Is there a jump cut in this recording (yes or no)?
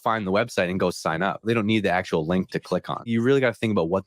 yes